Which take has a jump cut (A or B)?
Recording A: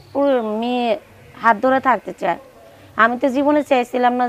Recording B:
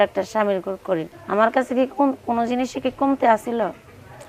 B